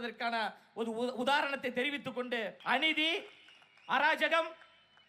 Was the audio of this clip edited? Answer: yes; 1 cut; at 2.5 s

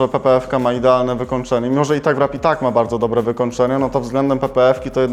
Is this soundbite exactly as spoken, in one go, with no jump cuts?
yes; 0 cuts

